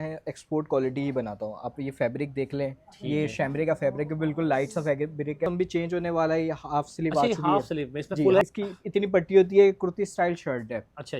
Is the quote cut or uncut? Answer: cut